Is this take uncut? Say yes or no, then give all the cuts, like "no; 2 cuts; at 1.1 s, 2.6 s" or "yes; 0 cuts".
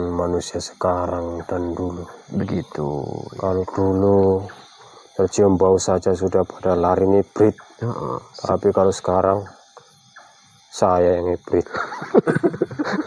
yes; 0 cuts